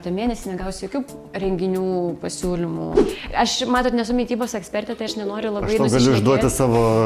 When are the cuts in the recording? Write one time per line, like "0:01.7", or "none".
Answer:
0:03.0